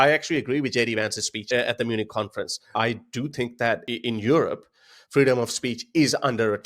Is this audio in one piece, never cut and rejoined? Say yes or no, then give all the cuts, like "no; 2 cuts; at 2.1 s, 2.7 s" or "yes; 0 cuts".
no; 2 cuts; at 2.6 s, 3.9 s